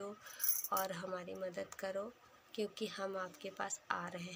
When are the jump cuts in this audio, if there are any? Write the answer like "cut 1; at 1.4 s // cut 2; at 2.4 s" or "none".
none